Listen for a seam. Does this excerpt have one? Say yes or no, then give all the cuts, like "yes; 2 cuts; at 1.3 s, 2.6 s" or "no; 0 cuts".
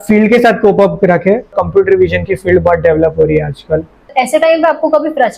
yes; 2 cuts; at 1.6 s, 4.1 s